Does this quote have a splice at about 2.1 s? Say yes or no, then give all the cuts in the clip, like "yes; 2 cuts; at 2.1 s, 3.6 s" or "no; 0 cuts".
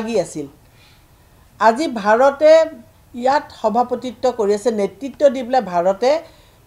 no; 0 cuts